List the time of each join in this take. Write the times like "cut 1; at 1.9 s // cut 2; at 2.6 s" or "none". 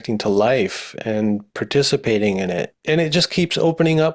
cut 1; at 2.7 s